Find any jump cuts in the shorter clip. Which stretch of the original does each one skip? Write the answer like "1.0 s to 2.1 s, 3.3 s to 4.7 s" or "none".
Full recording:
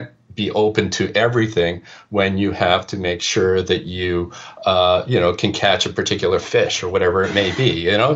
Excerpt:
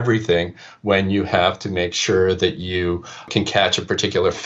4.6 s to 5.4 s